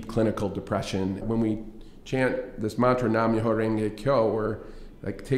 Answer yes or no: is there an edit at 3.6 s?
no